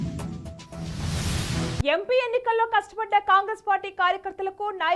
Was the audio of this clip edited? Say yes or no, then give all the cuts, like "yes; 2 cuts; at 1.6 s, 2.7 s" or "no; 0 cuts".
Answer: yes; 1 cut; at 1.8 s